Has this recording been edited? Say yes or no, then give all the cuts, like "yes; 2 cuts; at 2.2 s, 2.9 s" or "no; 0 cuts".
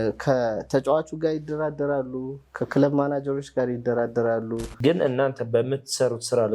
yes; 1 cut; at 4.7 s